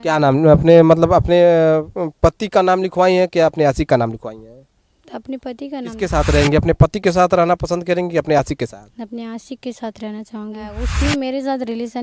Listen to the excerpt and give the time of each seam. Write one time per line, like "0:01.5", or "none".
0:06.0
0:10.8